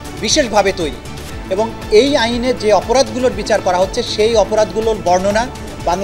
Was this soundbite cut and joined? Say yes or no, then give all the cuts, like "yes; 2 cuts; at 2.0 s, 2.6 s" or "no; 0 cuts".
no; 0 cuts